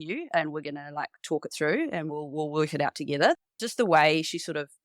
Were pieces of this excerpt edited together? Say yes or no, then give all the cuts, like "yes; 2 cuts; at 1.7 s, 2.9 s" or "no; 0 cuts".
no; 0 cuts